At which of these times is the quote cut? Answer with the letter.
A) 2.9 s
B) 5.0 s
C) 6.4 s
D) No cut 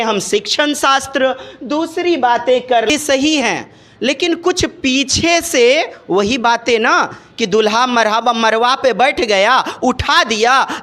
A